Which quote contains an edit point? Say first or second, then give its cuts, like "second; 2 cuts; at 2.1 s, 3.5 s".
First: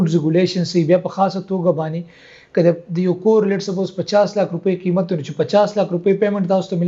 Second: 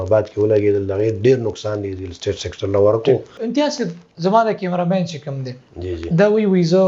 second; 1 cut; at 3.4 s